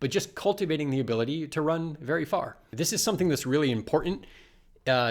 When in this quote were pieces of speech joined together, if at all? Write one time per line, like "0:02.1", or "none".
0:02.6